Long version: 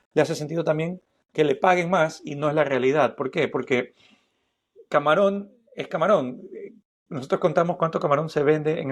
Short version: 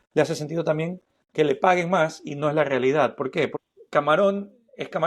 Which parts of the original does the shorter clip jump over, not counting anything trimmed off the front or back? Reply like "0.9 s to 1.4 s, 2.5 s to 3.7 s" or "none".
3.6 s to 4.6 s